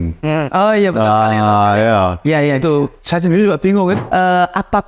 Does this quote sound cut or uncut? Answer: cut